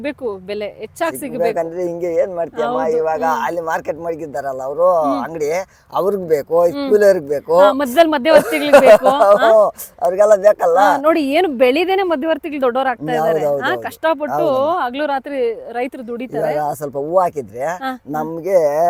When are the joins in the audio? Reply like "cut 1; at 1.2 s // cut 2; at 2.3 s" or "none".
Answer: none